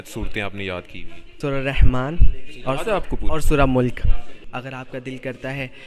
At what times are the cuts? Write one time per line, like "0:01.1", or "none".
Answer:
0:01.4
0:04.4